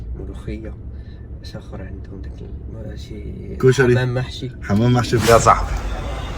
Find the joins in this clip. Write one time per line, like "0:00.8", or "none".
0:05.2

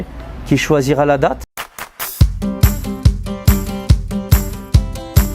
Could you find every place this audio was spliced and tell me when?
0:01.4

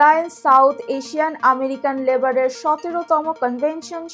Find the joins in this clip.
none

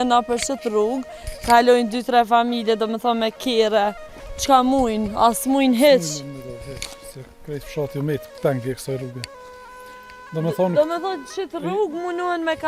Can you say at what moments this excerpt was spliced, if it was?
none

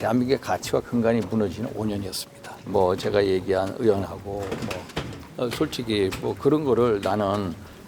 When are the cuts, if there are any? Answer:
0:02.7

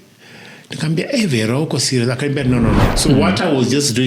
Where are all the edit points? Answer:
0:02.9

